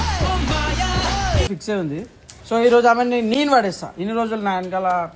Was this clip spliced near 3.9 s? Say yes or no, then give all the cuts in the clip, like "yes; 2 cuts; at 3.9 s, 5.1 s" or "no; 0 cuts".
no; 1 cut; at 1.5 s